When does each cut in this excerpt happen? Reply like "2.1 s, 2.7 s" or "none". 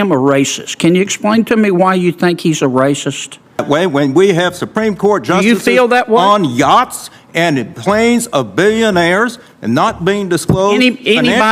3.6 s